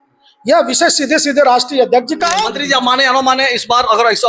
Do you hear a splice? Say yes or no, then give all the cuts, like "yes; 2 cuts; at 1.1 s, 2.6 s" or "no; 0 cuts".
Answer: yes; 1 cut; at 2.1 s